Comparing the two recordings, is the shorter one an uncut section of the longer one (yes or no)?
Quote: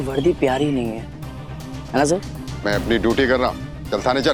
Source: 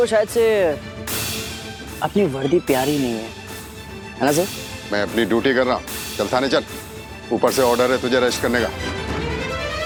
yes